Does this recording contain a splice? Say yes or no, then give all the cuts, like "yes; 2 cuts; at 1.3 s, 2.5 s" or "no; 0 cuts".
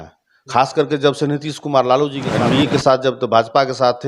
yes; 1 cut; at 2.2 s